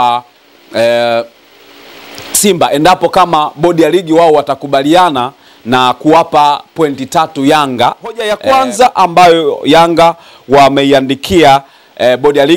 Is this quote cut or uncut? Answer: cut